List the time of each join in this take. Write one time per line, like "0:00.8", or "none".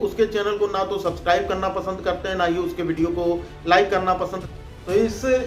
0:04.4